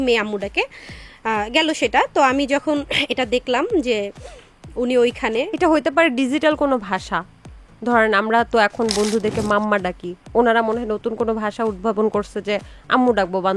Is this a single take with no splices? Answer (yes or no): yes